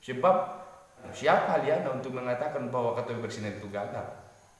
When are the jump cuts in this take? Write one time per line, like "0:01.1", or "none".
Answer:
0:01.1